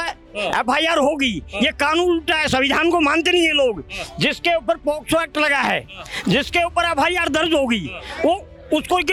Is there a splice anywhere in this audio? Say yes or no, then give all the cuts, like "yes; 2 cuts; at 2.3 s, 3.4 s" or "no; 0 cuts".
no; 0 cuts